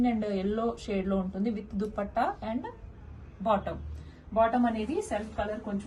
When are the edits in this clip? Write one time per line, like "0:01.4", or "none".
none

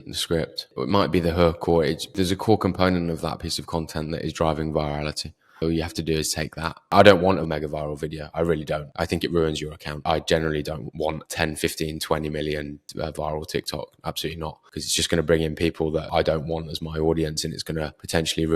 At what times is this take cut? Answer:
0:06.8
0:07.4

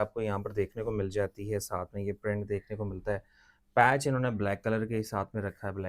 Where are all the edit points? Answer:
none

